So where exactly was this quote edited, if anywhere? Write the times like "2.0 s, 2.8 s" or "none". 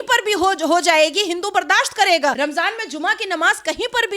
2.4 s